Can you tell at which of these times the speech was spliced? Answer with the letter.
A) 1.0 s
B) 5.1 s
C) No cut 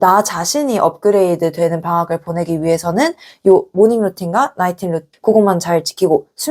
B